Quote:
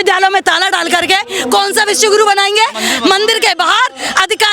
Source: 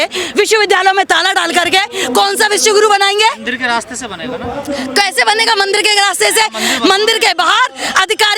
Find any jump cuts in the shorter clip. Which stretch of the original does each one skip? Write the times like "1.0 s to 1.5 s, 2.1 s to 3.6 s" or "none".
3.4 s to 6.6 s